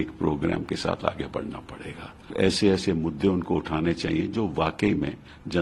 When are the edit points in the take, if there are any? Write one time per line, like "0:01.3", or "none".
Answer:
0:02.3